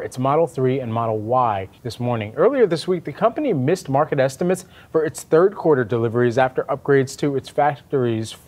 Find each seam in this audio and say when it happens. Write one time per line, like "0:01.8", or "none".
none